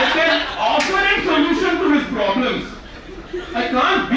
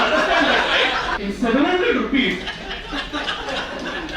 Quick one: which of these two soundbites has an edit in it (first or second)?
second